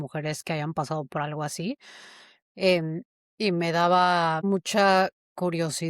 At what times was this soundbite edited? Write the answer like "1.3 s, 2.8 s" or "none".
4.4 s